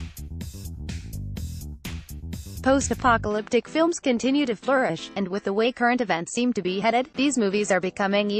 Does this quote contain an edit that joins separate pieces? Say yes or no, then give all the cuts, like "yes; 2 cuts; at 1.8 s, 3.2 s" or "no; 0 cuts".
no; 0 cuts